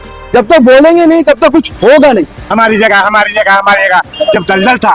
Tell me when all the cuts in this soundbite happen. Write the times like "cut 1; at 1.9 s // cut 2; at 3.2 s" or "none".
cut 1; at 2.4 s